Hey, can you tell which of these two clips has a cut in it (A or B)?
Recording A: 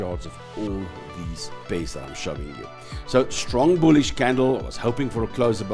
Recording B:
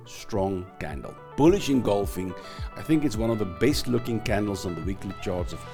A